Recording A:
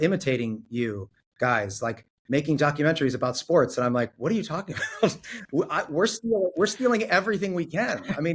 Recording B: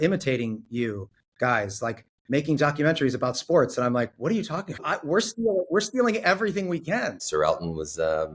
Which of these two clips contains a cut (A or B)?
B